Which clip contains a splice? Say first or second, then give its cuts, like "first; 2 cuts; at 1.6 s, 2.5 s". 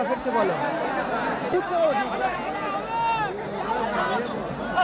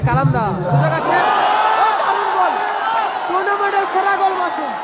first; 1 cut; at 1.5 s